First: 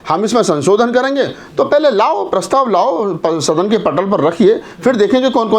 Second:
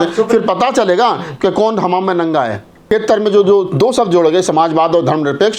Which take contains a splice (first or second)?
second